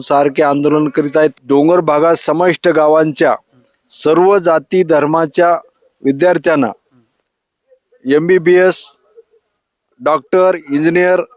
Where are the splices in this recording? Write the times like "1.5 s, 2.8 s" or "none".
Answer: 1.3 s